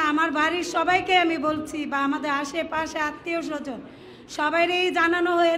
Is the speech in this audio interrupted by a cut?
no; 0 cuts

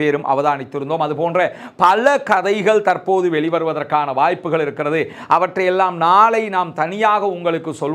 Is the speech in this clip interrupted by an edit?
no; 0 cuts

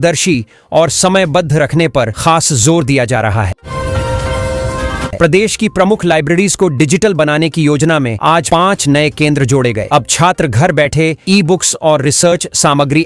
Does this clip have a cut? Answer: yes; 2 cuts; at 3.6 s, 5.1 s

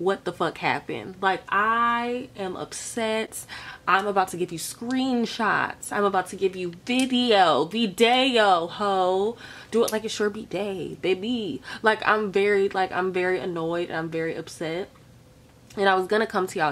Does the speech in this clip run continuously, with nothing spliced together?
yes; 0 cuts

